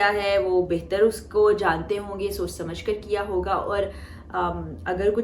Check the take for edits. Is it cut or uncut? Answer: uncut